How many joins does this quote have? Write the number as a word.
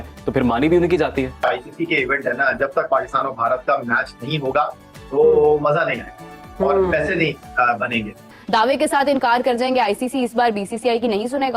two